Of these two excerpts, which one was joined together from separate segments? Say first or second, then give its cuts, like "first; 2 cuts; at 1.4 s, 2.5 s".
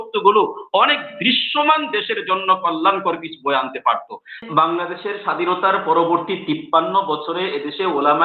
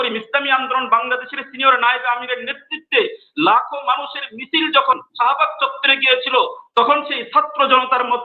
first; 1 cut; at 4.4 s